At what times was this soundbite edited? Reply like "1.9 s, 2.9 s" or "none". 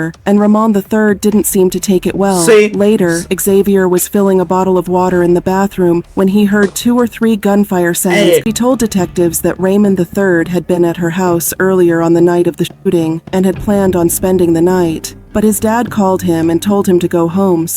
8.4 s